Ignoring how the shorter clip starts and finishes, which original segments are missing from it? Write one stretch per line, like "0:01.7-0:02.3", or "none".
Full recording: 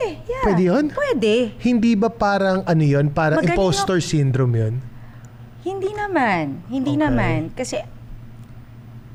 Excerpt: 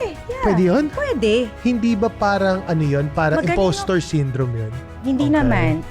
0:04.9-0:06.6